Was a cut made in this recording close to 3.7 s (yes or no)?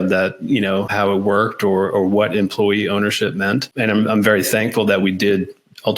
yes